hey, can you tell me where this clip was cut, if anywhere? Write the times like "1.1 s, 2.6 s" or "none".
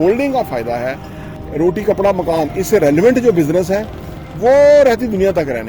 1.4 s